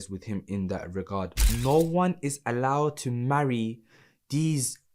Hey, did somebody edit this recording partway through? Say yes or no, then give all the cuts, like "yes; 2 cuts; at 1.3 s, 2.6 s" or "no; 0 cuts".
yes; 1 cut; at 1.4 s